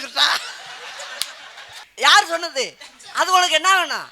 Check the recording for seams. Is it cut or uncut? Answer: cut